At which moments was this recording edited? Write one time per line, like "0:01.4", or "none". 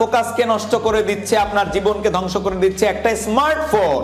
none